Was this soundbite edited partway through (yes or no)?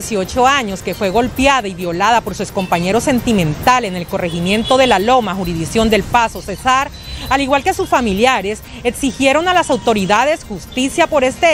no